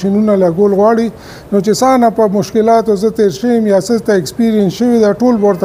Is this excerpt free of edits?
yes; 0 cuts

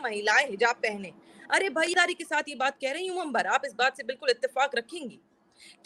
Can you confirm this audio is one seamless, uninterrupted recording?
no; 1 cut; at 1.9 s

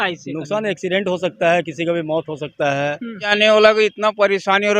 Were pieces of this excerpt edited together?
yes; 1 cut; at 3.2 s

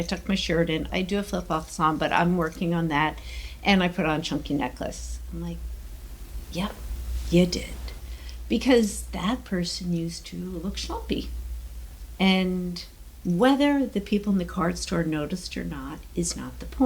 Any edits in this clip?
yes; 1 cut; at 0.9 s

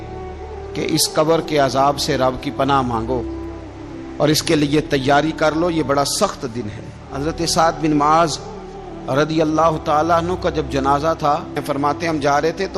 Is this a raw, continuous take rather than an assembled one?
no; 2 cuts; at 7.1 s, 11.6 s

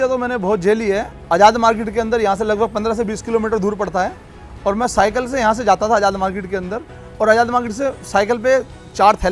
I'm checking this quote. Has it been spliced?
no; 0 cuts

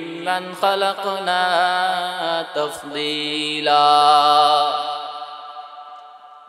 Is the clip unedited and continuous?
yes; 0 cuts

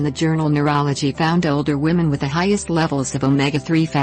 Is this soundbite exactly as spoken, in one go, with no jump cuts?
yes; 0 cuts

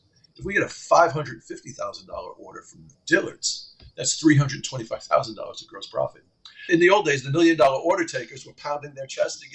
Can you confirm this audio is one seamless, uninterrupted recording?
no; 1 cut; at 6.7 s

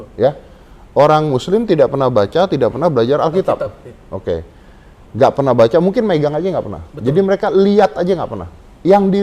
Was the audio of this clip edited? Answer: no; 0 cuts

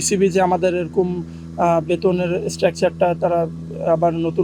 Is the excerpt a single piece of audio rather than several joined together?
yes; 0 cuts

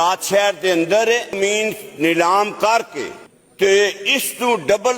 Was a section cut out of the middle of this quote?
yes; 1 cut; at 1.4 s

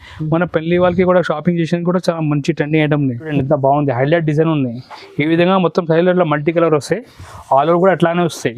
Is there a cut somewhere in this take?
yes; 1 cut; at 3.3 s

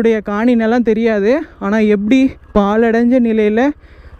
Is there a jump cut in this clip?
no; 0 cuts

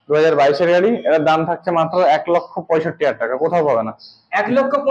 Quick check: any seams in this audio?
no; 0 cuts

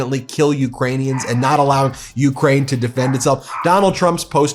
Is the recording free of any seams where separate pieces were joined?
yes; 0 cuts

